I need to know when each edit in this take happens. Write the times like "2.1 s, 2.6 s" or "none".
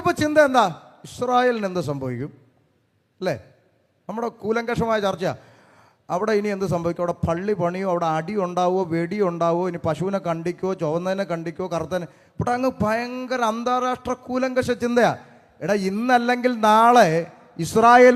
none